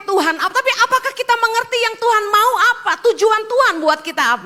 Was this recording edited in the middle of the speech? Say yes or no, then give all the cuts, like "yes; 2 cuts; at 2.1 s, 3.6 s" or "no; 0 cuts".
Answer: no; 0 cuts